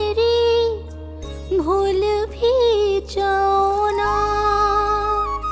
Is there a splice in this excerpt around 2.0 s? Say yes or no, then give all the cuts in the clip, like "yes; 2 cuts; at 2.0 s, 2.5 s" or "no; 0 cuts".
no; 0 cuts